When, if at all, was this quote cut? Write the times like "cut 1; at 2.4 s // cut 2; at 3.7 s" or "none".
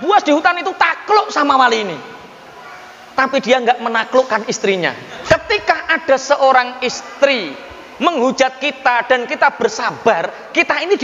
cut 1; at 5.1 s